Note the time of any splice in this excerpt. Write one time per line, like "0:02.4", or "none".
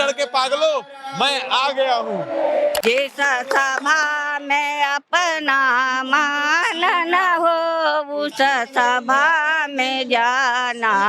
0:02.8